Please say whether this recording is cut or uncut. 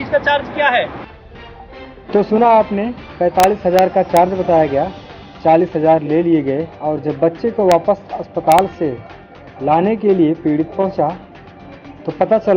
uncut